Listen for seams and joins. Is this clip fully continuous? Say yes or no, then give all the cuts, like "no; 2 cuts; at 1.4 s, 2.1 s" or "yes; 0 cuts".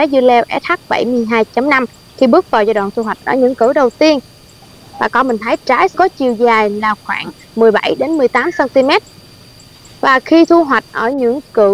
yes; 0 cuts